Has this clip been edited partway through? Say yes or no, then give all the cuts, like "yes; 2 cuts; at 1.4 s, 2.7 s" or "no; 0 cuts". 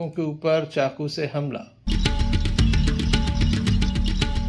yes; 1 cut; at 1.8 s